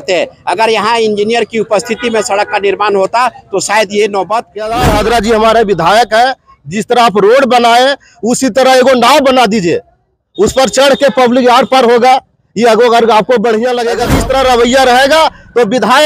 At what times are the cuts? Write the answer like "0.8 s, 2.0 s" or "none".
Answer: 4.6 s, 13.9 s